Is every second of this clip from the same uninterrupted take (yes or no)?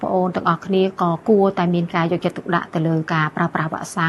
yes